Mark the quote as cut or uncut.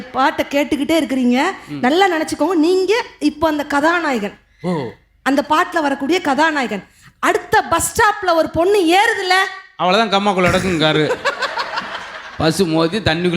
uncut